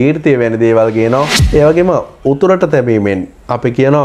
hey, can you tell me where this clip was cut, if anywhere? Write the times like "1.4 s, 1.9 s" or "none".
1.4 s